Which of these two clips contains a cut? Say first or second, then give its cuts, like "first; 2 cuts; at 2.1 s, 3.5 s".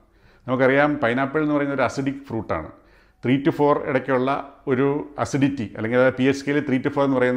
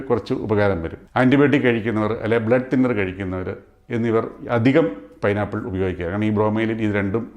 second; 1 cut; at 1.0 s